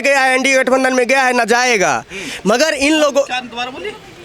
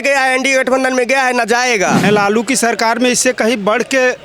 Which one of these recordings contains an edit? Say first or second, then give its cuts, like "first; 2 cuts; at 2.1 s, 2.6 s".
second; 1 cut; at 2.0 s